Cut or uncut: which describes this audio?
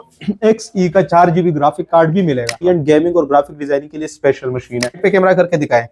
cut